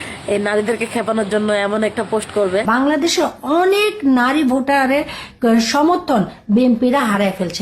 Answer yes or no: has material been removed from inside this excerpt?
yes